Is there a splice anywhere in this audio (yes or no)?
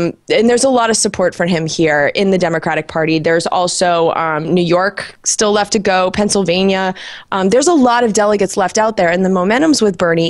no